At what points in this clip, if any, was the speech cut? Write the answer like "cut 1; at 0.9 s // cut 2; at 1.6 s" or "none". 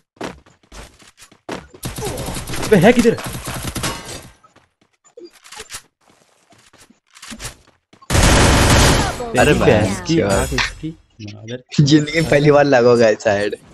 none